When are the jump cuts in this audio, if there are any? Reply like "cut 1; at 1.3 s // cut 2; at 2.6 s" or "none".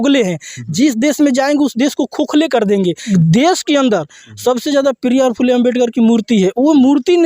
cut 1; at 3.1 s